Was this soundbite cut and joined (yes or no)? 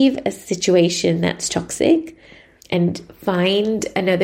no